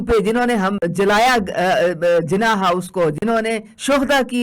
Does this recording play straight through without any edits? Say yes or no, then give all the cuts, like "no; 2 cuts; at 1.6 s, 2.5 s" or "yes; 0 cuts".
yes; 0 cuts